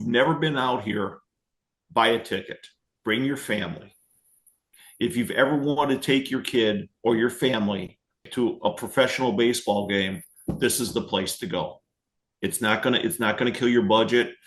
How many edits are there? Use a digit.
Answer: 2